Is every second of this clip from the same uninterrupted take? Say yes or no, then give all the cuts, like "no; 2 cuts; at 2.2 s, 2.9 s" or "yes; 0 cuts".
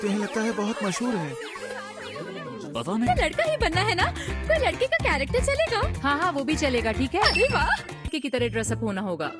yes; 0 cuts